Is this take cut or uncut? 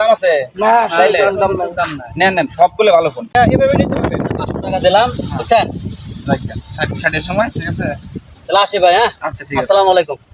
cut